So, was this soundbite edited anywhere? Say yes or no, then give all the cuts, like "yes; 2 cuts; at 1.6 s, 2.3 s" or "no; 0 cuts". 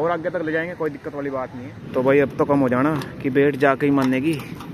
no; 0 cuts